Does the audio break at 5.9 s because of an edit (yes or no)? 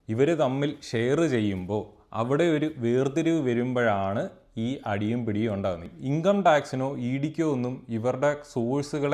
yes